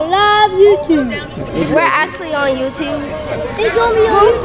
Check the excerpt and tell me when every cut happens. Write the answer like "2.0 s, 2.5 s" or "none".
1.5 s, 3.5 s